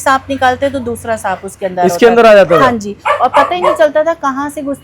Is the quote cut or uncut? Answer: uncut